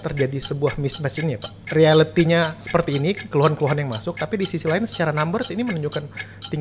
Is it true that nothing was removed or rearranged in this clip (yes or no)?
no